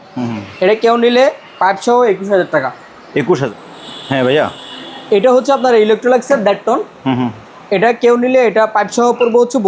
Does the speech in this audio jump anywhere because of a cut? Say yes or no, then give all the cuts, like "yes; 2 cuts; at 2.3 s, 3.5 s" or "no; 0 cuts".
yes; 1 cut; at 3.4 s